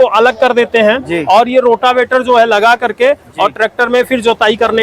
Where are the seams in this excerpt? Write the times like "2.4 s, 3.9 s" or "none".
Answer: none